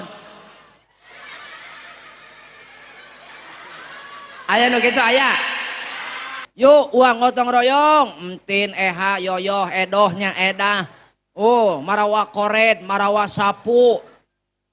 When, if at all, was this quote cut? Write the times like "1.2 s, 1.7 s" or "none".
6.4 s